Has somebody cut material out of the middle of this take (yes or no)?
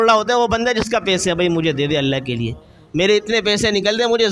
no